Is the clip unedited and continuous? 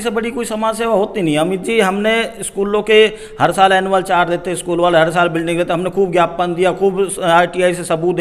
yes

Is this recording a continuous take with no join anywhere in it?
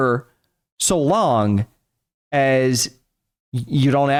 yes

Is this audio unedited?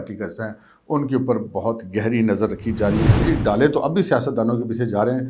no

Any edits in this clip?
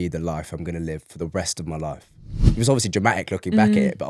yes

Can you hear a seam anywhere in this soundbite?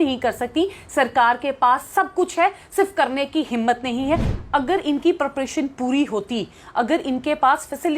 yes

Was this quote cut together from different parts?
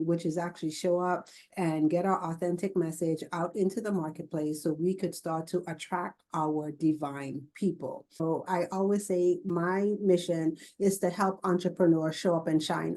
yes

